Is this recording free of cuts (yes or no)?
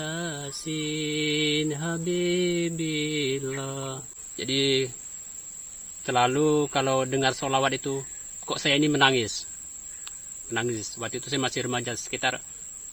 no